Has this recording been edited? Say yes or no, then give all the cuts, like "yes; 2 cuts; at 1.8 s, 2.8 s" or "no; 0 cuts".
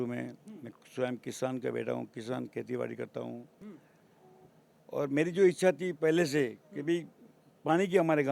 yes; 1 cut; at 3.6 s